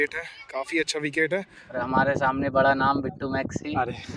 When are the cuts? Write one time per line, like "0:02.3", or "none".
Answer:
0:01.8